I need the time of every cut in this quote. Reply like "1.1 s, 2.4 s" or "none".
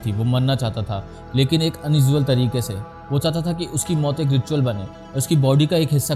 none